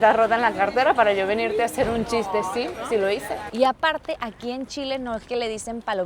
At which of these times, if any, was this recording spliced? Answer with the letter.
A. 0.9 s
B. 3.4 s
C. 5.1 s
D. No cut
B